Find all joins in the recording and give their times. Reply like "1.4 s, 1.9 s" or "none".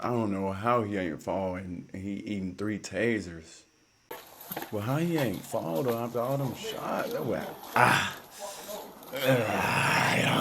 4.2 s